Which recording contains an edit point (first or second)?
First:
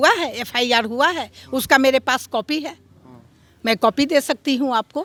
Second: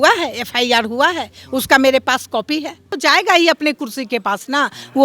second